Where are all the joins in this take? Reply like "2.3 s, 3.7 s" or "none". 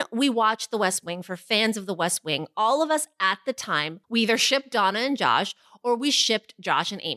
3.9 s